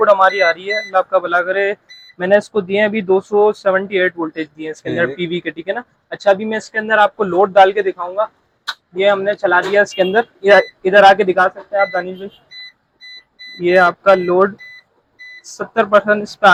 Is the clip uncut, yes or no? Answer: yes